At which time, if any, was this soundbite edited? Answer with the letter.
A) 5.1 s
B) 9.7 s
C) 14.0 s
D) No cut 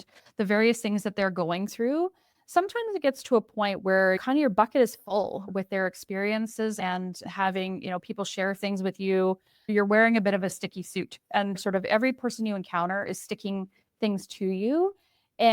B